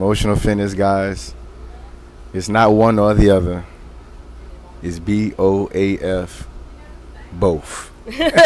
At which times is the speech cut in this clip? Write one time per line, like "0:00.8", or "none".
none